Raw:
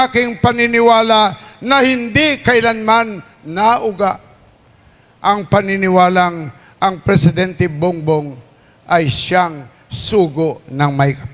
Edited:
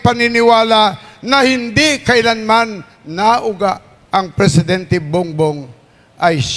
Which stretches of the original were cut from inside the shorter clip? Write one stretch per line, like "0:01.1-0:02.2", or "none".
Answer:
0:04.3-0:06.6